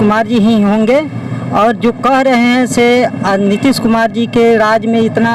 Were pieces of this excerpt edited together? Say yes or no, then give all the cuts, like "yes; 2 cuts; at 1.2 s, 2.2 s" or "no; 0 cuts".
no; 0 cuts